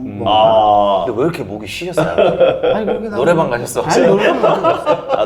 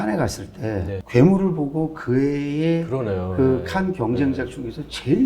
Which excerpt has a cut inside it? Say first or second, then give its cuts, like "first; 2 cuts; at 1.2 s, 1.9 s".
second; 1 cut; at 1.0 s